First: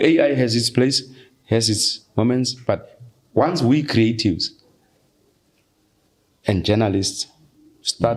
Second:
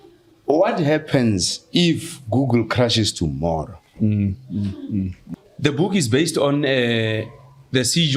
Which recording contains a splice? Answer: second; 1 cut; at 5.2 s

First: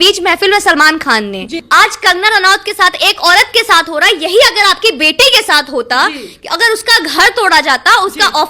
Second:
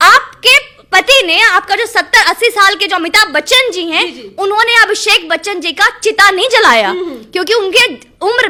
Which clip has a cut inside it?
first; 1 cut; at 1.6 s

